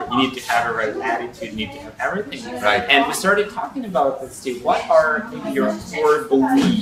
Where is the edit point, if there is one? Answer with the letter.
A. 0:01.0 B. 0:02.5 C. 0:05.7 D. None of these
D